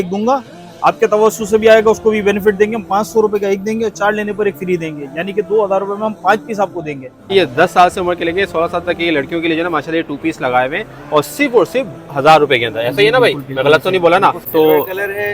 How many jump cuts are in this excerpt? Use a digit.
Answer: 2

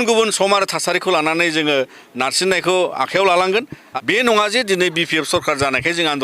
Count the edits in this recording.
1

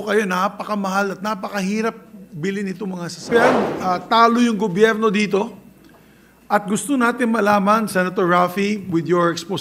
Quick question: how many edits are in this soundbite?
1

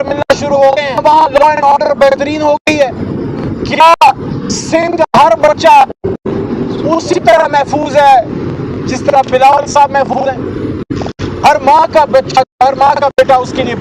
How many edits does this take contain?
1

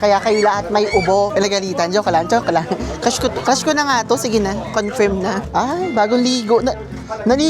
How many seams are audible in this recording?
2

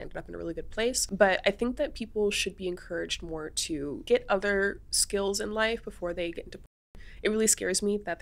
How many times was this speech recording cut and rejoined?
2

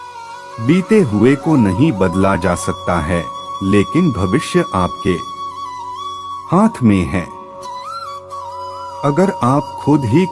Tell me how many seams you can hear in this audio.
2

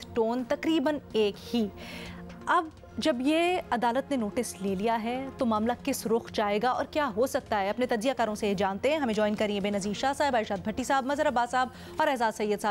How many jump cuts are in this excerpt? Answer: 0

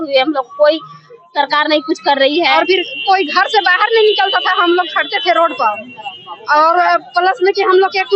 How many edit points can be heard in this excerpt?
1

